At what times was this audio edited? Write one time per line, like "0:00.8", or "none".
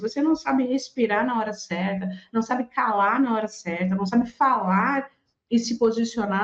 none

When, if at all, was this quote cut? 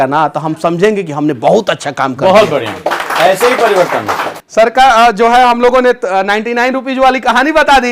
0:04.4

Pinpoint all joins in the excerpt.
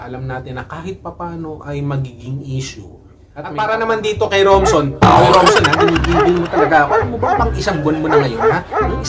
0:03.5

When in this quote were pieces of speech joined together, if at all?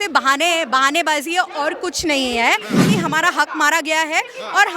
0:02.9

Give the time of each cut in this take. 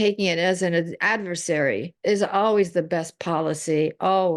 0:01.9

